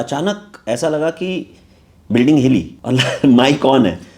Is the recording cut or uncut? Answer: cut